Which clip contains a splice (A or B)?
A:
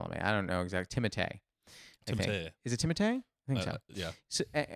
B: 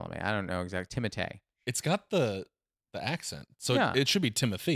B